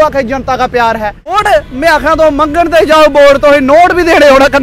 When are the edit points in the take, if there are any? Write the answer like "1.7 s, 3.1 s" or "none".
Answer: 1.4 s